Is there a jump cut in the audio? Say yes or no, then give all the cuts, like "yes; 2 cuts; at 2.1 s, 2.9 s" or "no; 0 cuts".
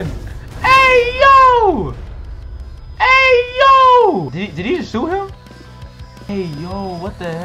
yes; 2 cuts; at 4.3 s, 6.3 s